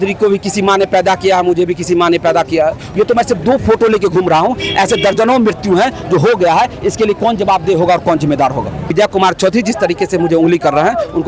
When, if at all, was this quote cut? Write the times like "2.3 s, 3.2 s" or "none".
2.8 s, 8.9 s